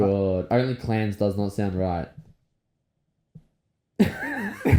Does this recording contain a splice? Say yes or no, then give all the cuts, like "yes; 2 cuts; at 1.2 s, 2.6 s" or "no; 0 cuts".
no; 0 cuts